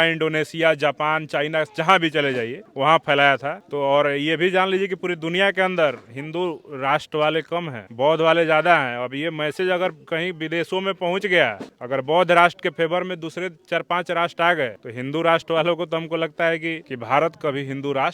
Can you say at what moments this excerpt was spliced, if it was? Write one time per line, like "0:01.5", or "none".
0:16.8